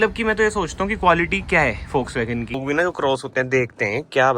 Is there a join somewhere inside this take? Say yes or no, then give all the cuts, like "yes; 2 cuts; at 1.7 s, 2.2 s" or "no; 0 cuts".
yes; 1 cut; at 2.6 s